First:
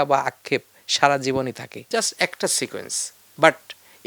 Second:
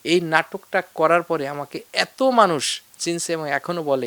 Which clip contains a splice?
first; 1 cut; at 1.7 s

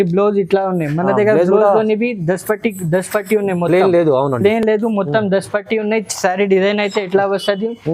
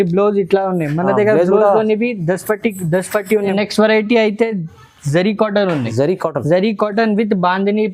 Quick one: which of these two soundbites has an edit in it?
second; 1 cut; at 3.5 s

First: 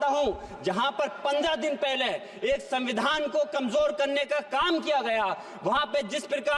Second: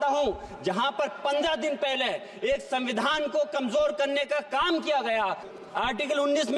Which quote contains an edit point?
second; 1 cut; at 5.5 s

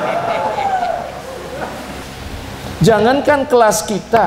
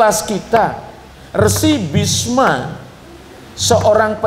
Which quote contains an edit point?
first; 1 cut; at 2.0 s

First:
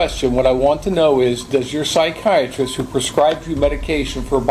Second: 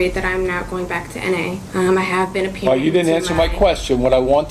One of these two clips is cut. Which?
second; 1 cut; at 1.6 s

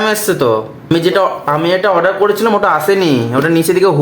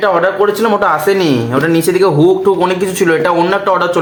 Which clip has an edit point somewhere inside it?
first; 1 cut; at 0.9 s

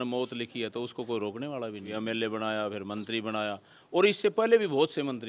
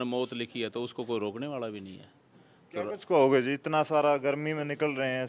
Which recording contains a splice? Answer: first; 1 cut; at 1.9 s

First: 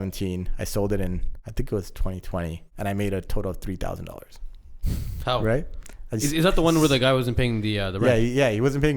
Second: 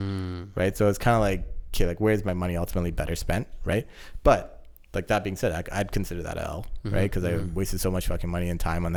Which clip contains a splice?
first; 2 cuts; at 1.4 s, 2.6 s

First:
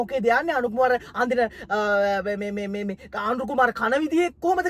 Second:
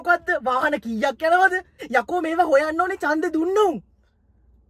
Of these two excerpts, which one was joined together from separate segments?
second; 1 cut; at 1.8 s

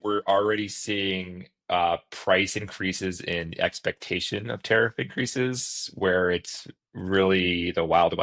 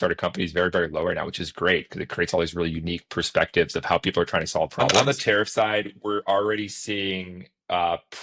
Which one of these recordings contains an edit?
second; 1 cut; at 5.0 s

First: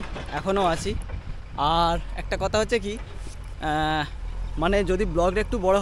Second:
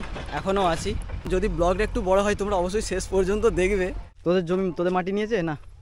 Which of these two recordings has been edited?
second; 2 cuts; at 1.3 s, 4.1 s

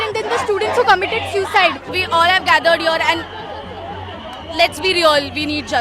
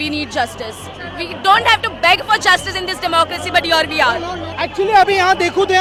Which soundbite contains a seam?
first; 1 cut; at 1.9 s

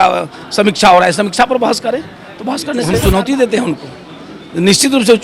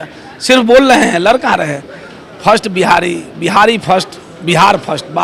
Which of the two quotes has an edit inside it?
first; 1 cut; at 2.9 s

